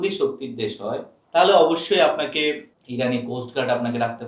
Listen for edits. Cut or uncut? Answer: cut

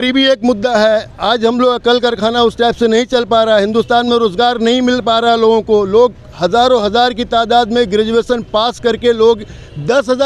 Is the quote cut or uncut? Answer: uncut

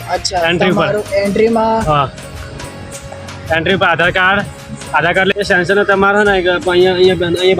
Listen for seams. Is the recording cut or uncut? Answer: cut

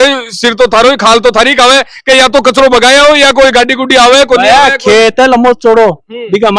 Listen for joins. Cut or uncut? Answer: uncut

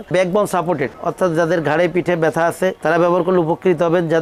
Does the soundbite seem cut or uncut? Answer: uncut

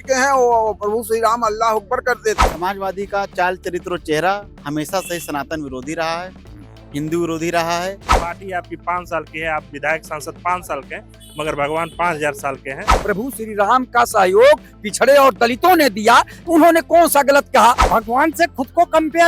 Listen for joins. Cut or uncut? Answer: cut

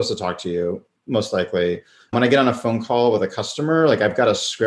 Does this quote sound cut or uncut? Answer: cut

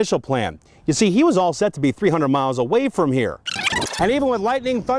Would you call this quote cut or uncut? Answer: cut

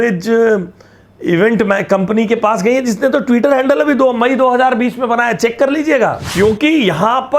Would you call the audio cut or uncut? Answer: cut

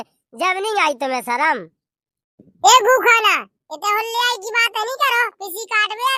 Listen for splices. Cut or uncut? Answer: uncut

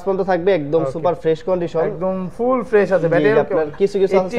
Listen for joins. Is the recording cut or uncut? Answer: uncut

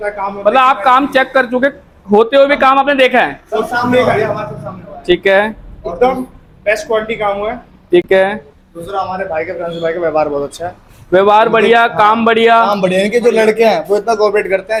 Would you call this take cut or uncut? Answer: uncut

